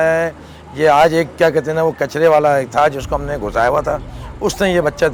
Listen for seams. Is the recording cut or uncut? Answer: uncut